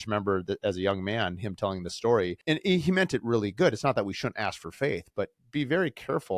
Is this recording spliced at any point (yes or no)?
yes